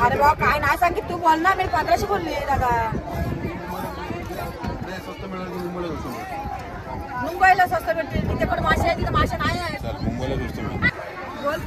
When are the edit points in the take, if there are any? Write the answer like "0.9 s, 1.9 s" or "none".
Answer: none

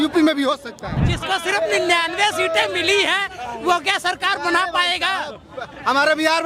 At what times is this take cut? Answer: 1.0 s

